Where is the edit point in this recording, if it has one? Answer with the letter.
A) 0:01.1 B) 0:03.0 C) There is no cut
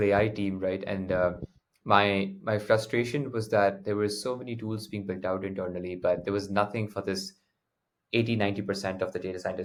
C